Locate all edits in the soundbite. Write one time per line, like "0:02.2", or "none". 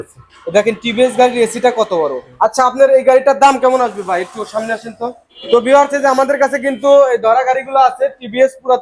0:02.2
0:05.3